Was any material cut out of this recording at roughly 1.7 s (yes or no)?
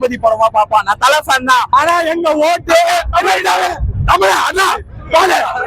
yes